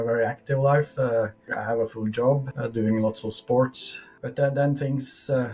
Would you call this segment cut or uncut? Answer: cut